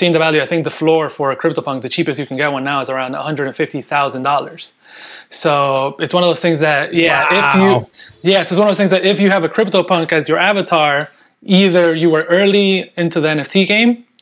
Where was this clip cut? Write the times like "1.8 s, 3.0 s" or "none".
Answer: none